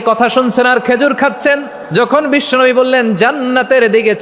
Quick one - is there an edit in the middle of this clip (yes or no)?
yes